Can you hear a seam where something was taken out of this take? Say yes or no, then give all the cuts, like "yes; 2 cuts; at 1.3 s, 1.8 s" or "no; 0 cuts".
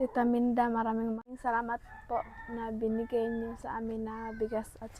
yes; 1 cut; at 1.2 s